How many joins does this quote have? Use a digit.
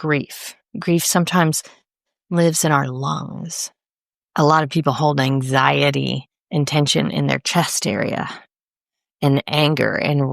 0